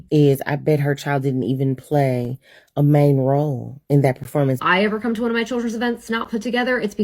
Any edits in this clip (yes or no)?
yes